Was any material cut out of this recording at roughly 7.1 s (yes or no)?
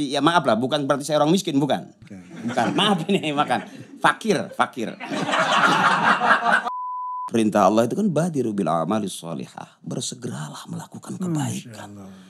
yes